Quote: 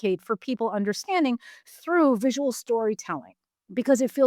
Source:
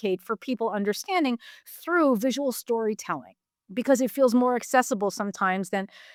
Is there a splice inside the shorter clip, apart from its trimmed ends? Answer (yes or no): no